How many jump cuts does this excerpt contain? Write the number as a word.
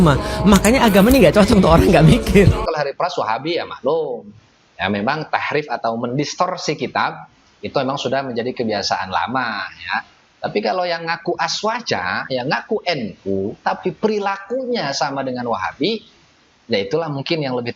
one